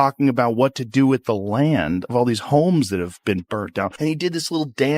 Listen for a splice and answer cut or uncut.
cut